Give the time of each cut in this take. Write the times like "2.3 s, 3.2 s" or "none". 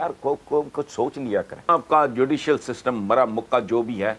1.7 s